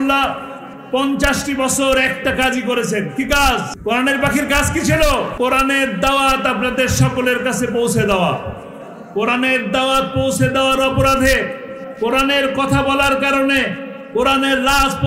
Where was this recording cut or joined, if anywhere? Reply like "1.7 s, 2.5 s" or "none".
3.7 s, 5.3 s

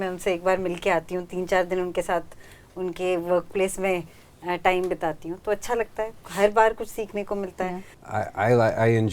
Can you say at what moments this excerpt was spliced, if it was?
7.9 s

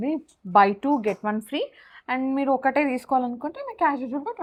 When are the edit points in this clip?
none

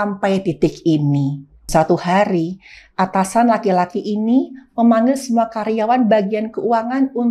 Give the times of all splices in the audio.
1.7 s

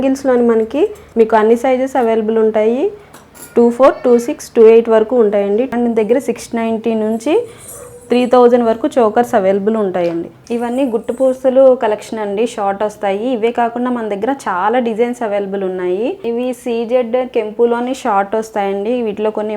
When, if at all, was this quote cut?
1.0 s, 5.7 s, 10.3 s, 16.2 s

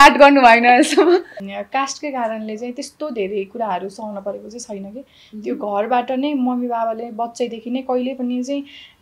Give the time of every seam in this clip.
1.4 s

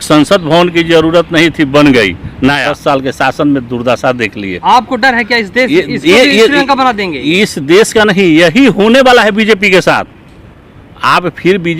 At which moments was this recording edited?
2.7 s

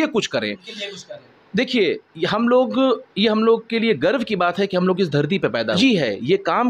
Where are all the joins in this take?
5.8 s

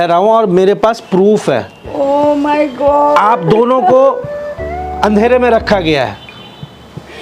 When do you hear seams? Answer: 1.9 s

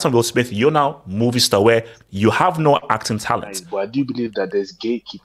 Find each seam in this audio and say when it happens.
3.6 s

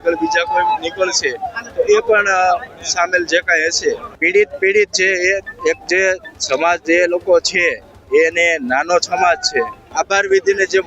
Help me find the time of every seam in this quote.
4.1 s, 9.8 s

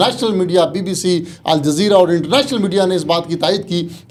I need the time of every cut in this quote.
none

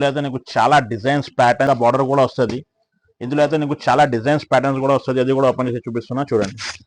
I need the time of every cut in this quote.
1.7 s

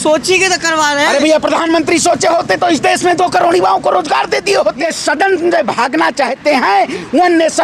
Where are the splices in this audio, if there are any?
4.8 s

